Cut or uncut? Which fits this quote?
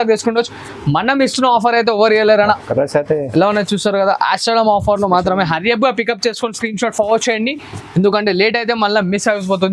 cut